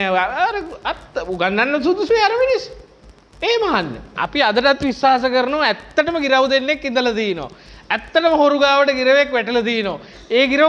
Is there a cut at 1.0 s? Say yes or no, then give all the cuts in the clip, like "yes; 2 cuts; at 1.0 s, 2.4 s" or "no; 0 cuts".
no; 1 cut; at 4.2 s